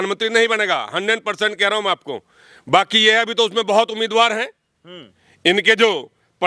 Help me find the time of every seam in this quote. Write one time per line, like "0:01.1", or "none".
none